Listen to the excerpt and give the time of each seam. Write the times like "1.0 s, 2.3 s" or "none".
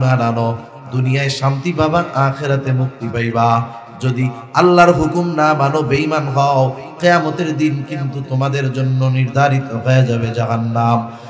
none